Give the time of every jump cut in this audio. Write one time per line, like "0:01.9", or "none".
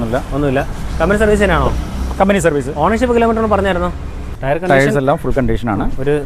0:04.3